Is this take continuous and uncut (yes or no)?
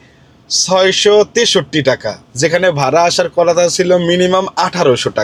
yes